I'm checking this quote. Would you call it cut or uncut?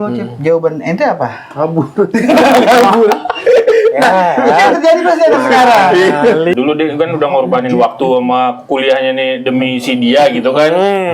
cut